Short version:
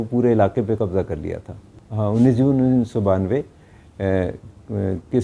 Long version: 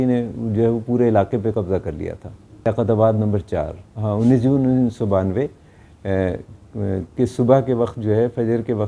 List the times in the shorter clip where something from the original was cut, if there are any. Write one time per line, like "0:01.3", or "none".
0:01.7